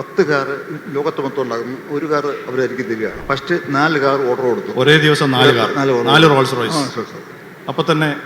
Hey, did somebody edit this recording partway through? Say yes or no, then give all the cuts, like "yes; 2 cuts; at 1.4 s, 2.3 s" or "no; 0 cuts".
yes; 1 cut; at 3.2 s